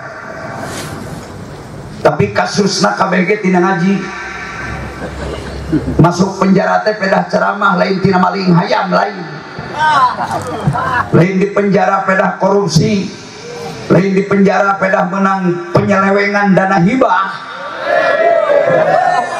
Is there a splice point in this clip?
no; 0 cuts

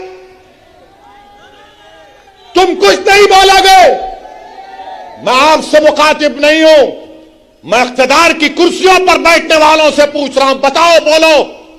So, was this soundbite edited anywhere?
no; 0 cuts

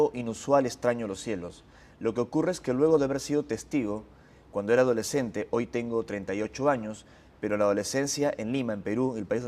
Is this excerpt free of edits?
yes; 0 cuts

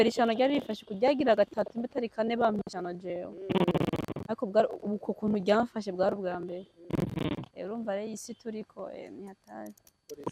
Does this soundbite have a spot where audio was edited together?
no; 0 cuts

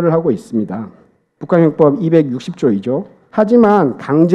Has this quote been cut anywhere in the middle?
yes; 1 cut; at 3.2 s

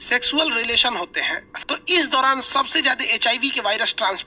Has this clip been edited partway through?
yes; 1 cut; at 1.5 s

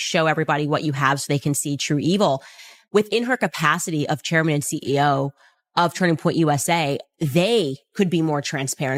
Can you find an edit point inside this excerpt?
no; 0 cuts

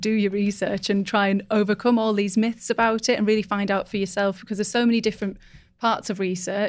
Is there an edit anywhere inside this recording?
no; 0 cuts

